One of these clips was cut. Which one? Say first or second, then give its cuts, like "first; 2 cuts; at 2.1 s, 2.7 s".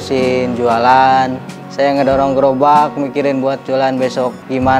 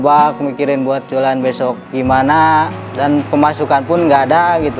first; 1 cut; at 1.6 s